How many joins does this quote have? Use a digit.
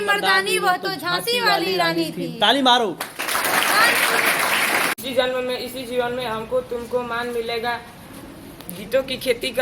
1